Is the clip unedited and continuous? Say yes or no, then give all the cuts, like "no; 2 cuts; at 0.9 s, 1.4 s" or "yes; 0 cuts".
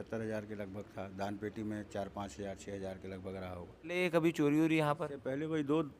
no; 1 cut; at 4.0 s